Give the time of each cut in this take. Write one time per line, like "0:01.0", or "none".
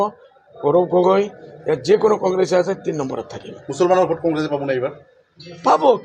none